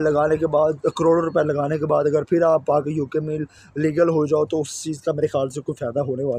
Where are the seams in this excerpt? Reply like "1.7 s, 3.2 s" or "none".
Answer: none